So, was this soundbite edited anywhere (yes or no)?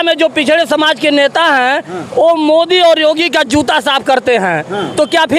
no